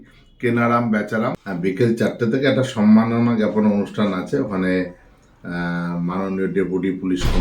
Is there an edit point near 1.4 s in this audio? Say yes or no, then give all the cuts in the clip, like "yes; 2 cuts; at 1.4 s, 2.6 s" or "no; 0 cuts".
yes; 1 cut; at 1.4 s